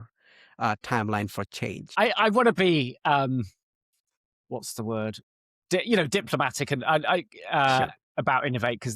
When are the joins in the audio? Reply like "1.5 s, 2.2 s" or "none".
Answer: 1.8 s